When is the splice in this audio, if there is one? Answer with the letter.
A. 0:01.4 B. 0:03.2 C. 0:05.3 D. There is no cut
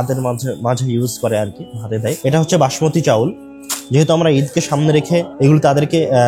C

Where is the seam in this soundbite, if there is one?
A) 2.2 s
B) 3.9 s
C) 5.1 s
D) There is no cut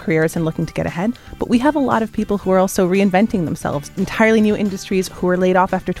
B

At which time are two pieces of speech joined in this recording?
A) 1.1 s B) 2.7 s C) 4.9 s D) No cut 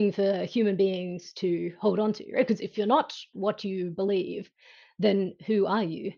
B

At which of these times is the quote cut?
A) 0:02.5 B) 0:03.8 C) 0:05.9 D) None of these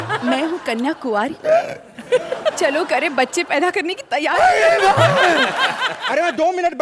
C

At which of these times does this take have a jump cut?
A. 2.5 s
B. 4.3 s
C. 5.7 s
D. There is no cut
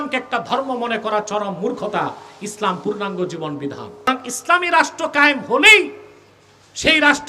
B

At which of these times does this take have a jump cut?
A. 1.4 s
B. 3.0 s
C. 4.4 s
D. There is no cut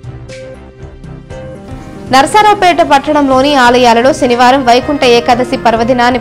A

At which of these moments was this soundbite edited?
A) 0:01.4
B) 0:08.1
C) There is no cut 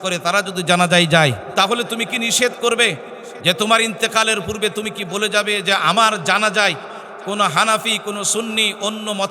A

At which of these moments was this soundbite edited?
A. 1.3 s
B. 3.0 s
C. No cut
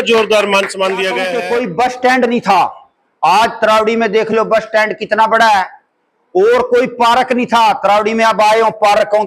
A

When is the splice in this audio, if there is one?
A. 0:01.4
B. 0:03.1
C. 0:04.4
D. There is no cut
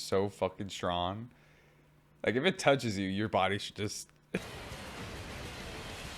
C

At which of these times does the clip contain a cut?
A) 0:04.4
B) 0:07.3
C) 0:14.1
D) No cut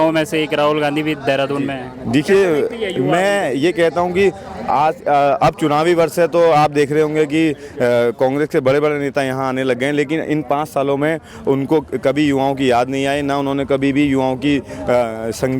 D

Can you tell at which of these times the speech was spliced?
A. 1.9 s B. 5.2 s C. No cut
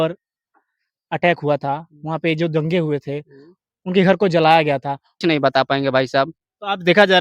B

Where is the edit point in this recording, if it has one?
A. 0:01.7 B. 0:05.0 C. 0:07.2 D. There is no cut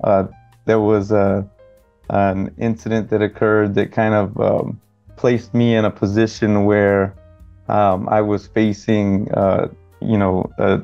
D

